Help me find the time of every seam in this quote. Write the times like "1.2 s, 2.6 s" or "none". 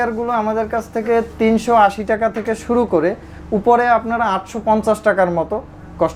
none